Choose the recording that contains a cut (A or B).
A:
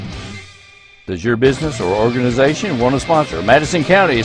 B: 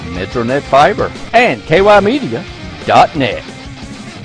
B